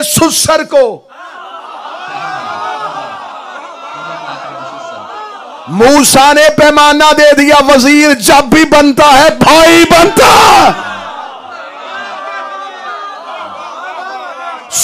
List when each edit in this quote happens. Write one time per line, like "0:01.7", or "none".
none